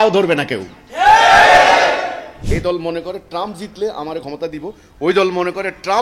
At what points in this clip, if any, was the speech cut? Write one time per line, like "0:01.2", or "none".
0:02.3